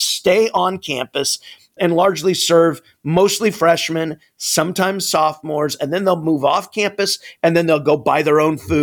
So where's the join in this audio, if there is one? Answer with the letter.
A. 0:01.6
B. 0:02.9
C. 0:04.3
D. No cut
D